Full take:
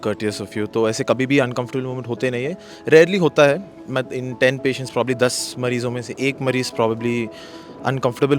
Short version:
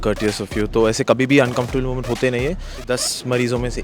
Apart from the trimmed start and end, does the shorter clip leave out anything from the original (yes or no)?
yes